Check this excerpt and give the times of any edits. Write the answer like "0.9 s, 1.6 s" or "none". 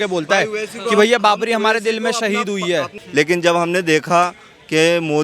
3.0 s